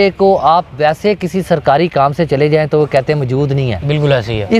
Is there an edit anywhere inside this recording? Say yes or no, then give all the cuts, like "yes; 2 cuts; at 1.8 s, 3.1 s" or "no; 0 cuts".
no; 0 cuts